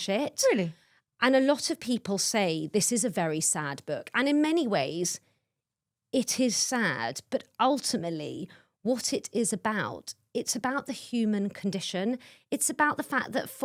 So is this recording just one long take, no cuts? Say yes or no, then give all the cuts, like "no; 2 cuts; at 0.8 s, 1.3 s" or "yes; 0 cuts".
yes; 0 cuts